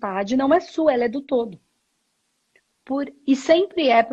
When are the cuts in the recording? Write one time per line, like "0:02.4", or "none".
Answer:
none